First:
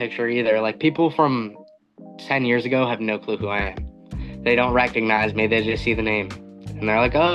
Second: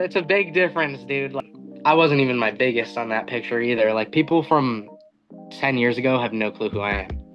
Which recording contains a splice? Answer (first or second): second